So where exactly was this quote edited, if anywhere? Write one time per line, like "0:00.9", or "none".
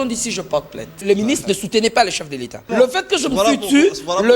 0:01.0
0:02.7